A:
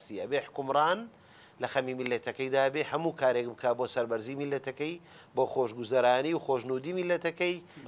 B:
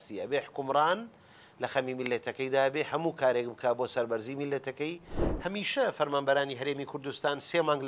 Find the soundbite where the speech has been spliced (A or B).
B